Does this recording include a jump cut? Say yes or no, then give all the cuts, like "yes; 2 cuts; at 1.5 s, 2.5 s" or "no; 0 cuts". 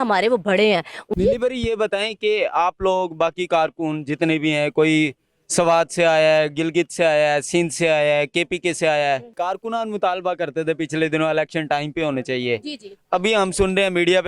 yes; 2 cuts; at 1.0 s, 9.3 s